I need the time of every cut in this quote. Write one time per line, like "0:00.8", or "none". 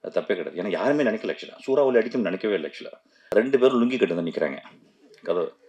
0:03.1